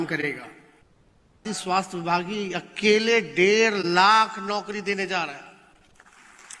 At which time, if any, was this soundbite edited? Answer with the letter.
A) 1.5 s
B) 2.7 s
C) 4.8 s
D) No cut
A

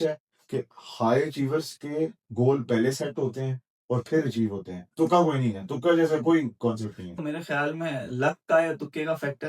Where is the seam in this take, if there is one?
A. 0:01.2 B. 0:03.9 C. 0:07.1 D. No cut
C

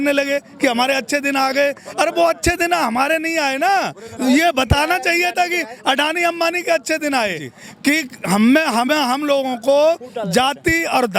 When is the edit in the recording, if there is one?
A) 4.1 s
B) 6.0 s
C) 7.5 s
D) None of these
C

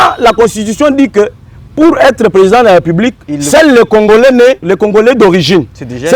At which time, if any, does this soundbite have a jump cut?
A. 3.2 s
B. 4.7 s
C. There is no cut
B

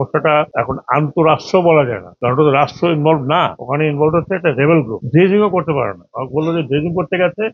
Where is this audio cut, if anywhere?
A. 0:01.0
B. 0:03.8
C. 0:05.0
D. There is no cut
C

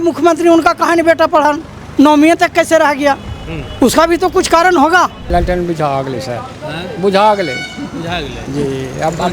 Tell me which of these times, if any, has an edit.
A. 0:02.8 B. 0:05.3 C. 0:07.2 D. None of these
B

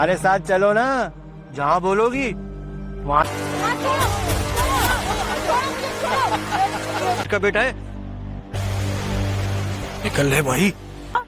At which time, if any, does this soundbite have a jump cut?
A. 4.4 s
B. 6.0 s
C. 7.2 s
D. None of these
C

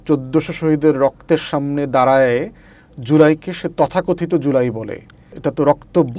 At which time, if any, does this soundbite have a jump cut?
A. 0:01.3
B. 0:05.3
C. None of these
B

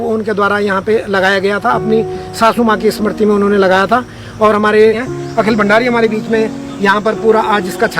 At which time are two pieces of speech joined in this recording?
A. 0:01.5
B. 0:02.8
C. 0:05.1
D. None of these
C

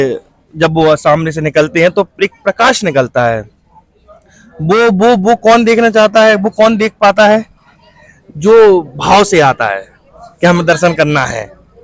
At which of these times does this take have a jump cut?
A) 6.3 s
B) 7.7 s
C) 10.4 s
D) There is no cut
D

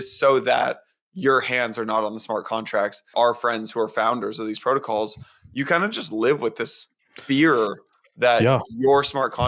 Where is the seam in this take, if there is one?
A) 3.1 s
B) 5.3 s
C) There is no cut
A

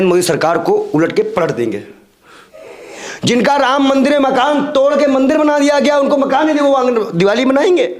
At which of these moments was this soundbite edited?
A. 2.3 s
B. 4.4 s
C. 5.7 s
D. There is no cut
A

